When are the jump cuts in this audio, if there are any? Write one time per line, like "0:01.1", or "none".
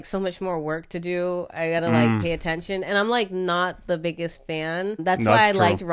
none